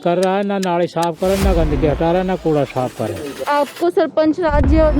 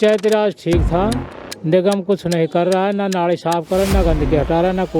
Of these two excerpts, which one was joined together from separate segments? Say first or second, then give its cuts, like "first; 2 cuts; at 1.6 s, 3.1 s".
first; 1 cut; at 3.4 s